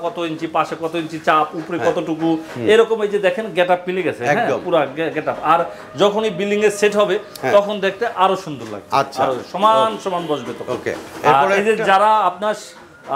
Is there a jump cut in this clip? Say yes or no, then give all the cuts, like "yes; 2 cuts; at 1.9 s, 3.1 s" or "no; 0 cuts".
no; 0 cuts